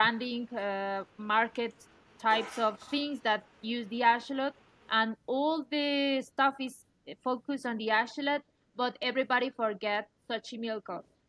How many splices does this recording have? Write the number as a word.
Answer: zero